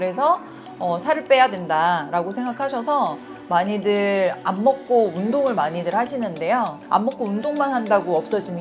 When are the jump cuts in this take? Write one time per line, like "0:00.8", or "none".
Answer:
0:06.8